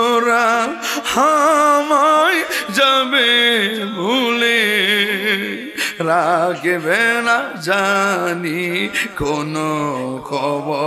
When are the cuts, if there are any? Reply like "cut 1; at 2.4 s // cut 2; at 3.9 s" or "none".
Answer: none